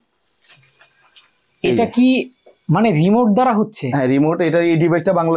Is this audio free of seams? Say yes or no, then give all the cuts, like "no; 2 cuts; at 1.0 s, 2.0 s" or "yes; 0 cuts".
yes; 0 cuts